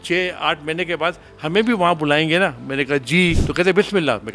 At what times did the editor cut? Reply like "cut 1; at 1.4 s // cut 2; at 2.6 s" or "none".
cut 1; at 3.4 s

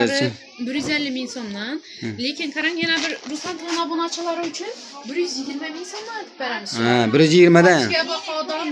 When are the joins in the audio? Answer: none

